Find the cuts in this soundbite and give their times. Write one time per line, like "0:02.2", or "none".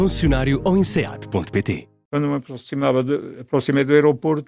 0:02.0